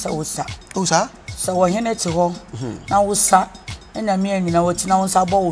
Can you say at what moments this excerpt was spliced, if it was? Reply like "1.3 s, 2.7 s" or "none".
none